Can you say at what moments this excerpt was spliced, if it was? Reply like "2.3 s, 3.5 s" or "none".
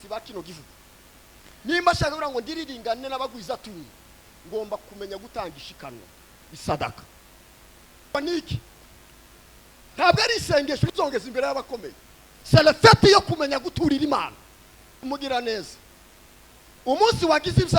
8.1 s, 15.0 s